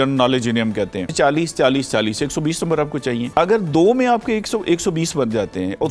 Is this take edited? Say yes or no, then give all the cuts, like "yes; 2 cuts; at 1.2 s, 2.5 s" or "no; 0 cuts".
yes; 2 cuts; at 1.1 s, 3.3 s